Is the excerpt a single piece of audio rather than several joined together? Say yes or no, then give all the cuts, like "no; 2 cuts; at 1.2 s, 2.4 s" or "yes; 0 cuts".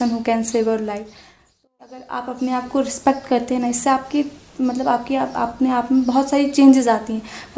no; 1 cut; at 1.6 s